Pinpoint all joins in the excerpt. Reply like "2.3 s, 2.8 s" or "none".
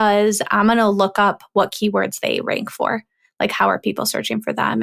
none